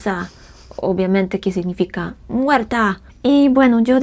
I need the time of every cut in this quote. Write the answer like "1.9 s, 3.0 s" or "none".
3.1 s